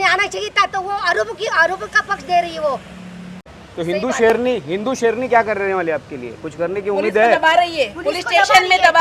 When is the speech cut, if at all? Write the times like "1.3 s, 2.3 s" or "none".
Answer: 3.5 s